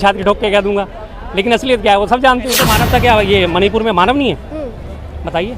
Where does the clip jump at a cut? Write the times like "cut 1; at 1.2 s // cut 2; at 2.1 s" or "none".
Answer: cut 1; at 2.6 s

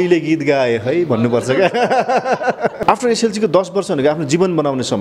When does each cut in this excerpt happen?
cut 1; at 2.8 s

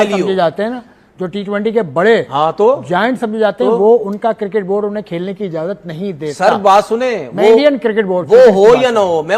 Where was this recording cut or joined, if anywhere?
none

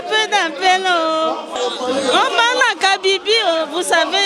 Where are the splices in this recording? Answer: cut 1; at 1.5 s

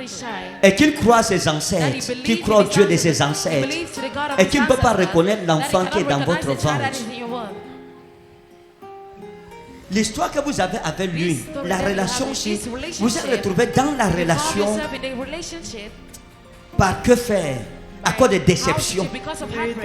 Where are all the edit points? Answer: cut 1; at 9.6 s

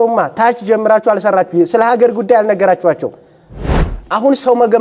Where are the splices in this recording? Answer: cut 1; at 3.8 s

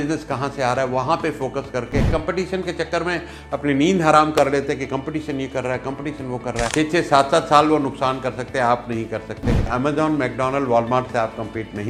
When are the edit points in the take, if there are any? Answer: cut 1; at 2.1 s // cut 2; at 6.7 s // cut 3; at 9.6 s

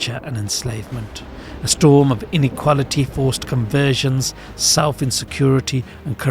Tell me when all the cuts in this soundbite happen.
cut 1; at 1.7 s

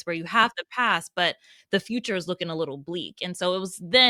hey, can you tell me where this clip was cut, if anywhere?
none

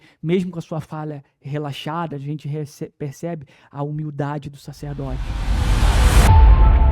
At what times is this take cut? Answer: cut 1; at 5.3 s

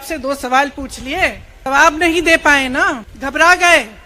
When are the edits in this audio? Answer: cut 1; at 1.7 s // cut 2; at 3.1 s

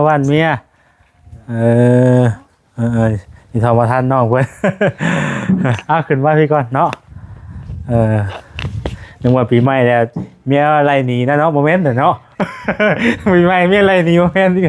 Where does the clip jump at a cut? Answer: none

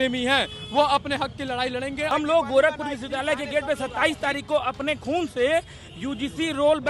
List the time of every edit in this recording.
cut 1; at 2.1 s

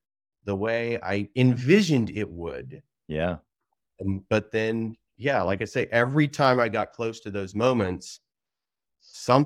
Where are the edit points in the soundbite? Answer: cut 1; at 1.3 s

